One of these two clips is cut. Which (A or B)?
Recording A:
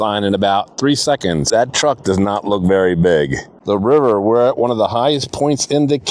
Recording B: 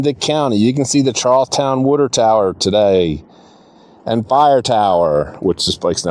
A